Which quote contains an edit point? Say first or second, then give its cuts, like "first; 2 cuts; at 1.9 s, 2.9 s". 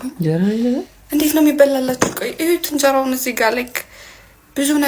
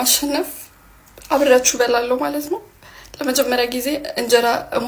first; 1 cut; at 1.0 s